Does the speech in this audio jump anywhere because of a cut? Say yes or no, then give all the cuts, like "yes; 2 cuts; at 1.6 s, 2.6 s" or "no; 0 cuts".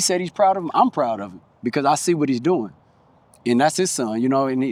no; 0 cuts